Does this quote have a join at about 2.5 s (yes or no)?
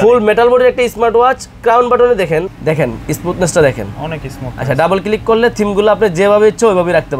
yes